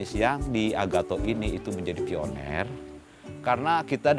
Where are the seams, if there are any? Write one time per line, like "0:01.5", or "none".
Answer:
none